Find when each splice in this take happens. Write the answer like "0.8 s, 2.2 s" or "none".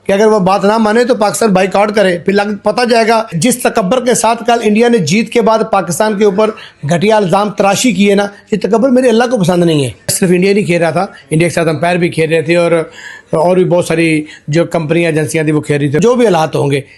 3.3 s, 10.1 s, 16.0 s